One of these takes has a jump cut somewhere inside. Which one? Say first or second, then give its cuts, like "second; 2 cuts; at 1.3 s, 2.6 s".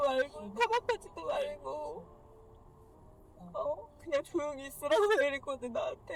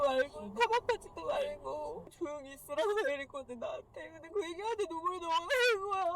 second; 1 cut; at 2.1 s